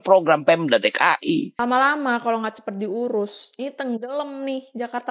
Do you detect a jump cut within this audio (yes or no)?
yes